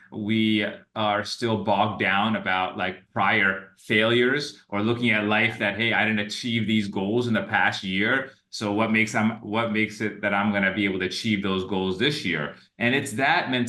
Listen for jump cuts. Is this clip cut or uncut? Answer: uncut